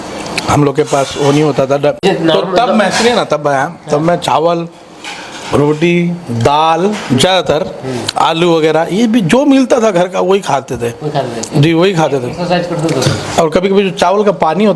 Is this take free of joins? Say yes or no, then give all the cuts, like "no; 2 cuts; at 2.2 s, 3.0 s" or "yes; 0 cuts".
no; 1 cut; at 2.0 s